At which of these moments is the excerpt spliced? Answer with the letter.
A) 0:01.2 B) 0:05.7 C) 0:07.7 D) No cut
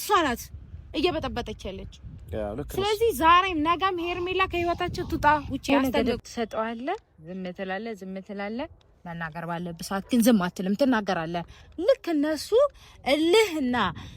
B